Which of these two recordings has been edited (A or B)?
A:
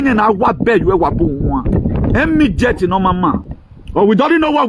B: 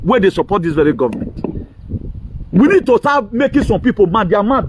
A